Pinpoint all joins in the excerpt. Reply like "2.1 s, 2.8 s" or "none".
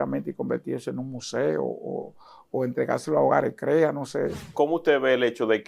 4.5 s